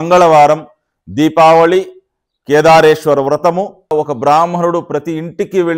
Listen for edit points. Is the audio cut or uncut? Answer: cut